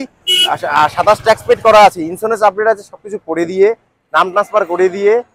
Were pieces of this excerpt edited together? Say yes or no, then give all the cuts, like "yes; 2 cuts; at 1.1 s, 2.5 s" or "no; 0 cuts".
no; 0 cuts